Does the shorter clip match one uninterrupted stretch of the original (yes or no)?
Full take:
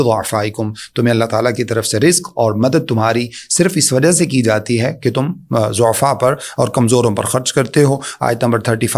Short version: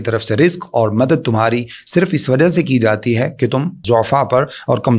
no